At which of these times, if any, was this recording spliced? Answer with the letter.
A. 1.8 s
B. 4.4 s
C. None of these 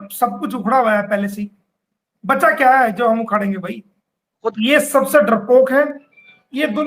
B